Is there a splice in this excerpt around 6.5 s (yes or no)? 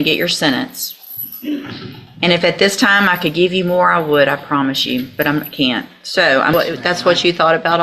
yes